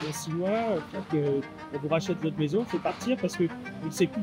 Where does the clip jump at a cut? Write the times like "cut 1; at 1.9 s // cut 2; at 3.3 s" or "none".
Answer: none